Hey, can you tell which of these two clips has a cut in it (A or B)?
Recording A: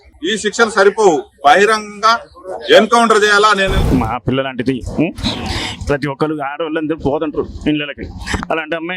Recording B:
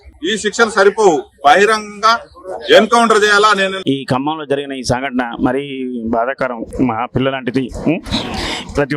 A